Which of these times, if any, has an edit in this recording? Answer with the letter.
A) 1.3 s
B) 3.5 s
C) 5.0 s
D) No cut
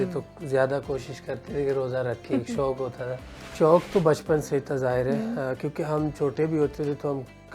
B